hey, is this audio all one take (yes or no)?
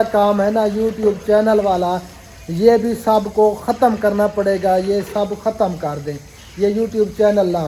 yes